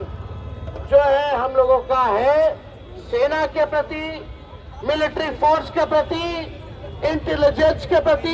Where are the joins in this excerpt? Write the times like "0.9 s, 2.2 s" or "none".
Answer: none

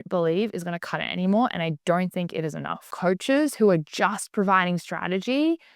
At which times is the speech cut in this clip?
2.9 s

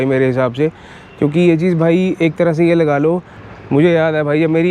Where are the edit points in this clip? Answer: 3.4 s

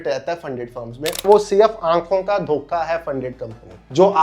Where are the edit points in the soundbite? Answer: 1.2 s

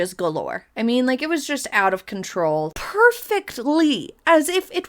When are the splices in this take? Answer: 2.7 s

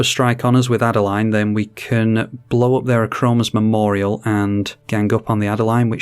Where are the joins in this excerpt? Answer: 4.8 s

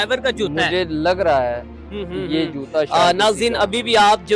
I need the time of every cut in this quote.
none

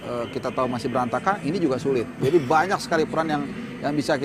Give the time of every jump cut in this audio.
none

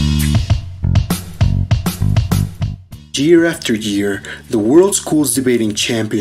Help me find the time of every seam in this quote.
none

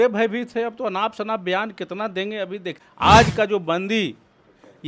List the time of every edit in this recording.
2.8 s

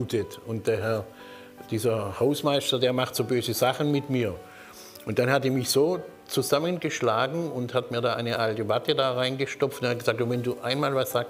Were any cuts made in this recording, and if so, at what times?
none

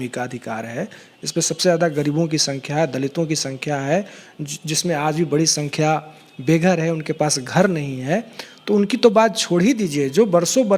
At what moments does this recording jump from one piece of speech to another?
none

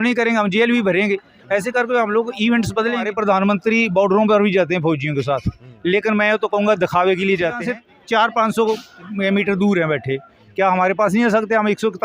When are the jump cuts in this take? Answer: 3.1 s, 7.6 s

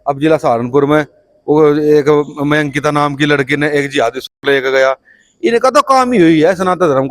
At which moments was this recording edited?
none

